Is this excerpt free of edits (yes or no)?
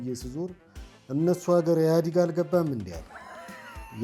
yes